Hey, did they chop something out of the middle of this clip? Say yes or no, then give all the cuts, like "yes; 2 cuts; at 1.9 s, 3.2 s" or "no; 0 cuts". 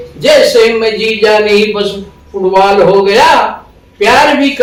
no; 0 cuts